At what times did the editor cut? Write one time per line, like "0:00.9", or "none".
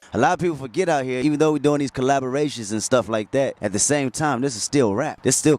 0:01.2